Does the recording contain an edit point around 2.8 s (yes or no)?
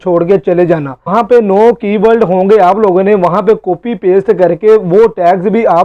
no